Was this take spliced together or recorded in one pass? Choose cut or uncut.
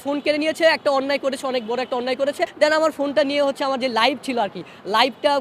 cut